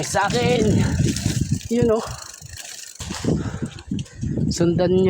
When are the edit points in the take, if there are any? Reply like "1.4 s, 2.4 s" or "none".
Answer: 3.0 s